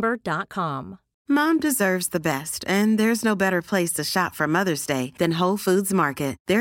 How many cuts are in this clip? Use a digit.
1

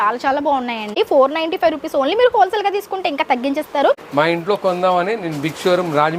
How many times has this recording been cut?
2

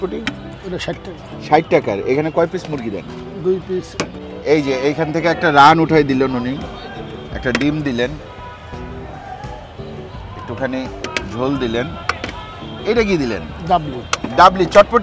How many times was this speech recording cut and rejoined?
1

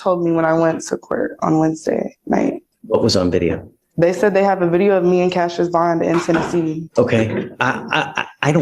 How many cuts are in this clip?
2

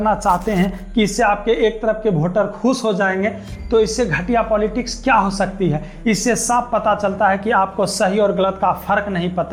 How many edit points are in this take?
0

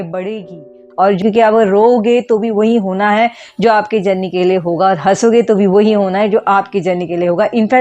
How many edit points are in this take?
1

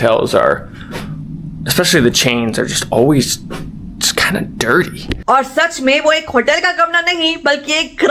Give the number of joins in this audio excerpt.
1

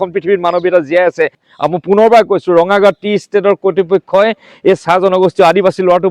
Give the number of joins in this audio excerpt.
1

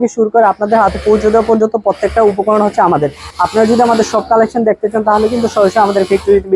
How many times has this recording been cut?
1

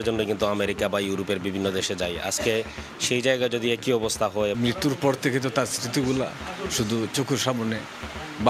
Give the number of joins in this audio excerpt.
1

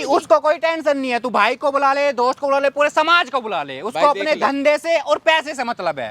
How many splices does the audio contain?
0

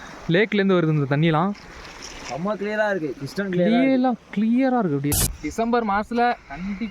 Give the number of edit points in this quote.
1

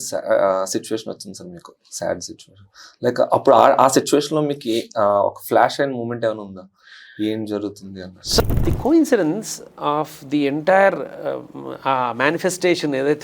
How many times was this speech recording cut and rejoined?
1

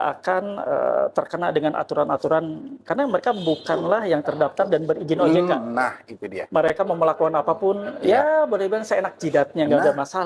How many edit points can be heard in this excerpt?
0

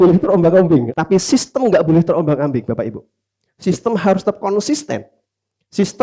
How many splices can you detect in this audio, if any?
1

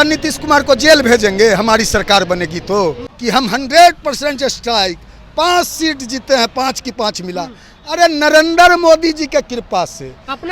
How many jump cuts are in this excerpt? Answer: 1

